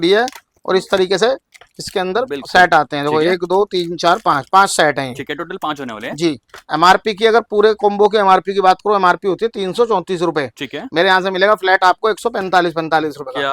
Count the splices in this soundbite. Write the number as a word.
zero